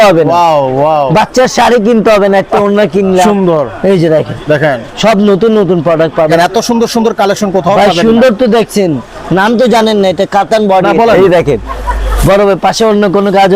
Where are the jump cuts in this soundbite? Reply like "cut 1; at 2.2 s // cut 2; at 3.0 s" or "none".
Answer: cut 1; at 3.2 s // cut 2; at 6.3 s // cut 3; at 11.1 s